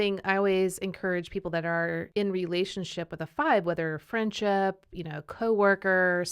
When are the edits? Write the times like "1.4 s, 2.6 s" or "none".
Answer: 2.1 s